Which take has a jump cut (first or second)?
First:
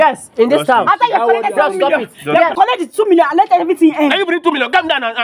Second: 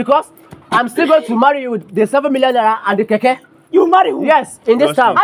first